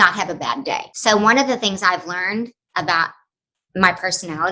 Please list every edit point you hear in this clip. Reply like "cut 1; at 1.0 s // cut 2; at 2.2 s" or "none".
cut 1; at 0.9 s